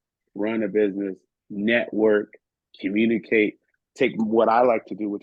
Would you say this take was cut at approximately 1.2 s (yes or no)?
no